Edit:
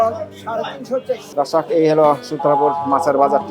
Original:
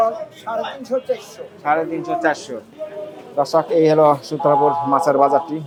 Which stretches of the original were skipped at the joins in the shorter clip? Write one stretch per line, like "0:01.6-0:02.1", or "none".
0:01.3-0:03.3

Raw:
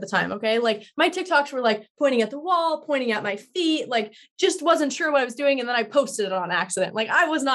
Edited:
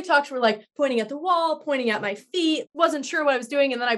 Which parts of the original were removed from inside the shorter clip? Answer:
0:03.9-0:04.6

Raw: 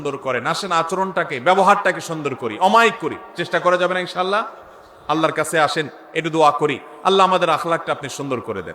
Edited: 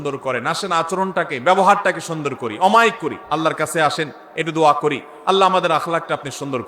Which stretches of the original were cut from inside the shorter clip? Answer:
0:03.1-0:04.9

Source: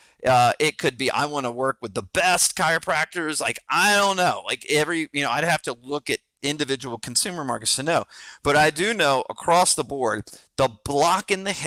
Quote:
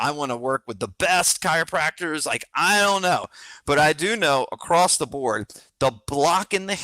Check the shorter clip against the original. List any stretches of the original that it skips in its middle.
0:04.5-0:08.2

